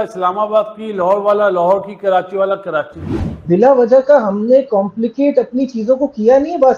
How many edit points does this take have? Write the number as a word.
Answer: one